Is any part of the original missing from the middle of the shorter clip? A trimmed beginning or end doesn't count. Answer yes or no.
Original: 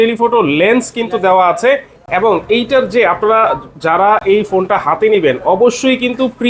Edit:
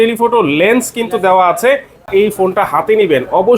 yes